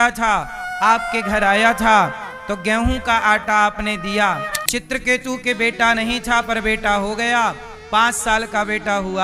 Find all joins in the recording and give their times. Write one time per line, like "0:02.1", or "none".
0:04.6